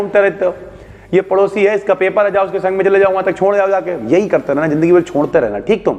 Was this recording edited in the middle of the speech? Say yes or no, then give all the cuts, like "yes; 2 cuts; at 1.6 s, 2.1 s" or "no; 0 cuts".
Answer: no; 0 cuts